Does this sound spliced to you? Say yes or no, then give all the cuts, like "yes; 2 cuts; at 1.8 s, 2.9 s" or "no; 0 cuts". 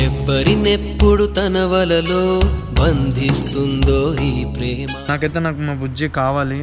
yes; 1 cut; at 5.0 s